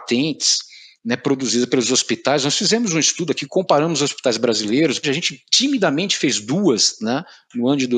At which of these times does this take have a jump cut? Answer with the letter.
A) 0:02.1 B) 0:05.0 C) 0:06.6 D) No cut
B